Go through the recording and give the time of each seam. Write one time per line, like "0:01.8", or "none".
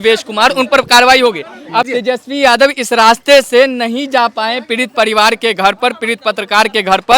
0:01.9